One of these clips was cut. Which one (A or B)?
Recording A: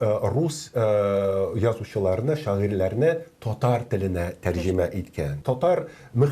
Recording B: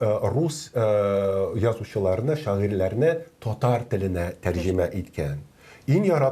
A